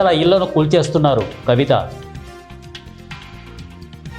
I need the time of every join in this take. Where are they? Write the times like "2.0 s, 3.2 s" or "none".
1.9 s